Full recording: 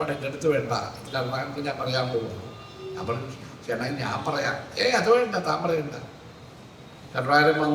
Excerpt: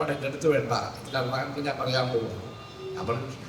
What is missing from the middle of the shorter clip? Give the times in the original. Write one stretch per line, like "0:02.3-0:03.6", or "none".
none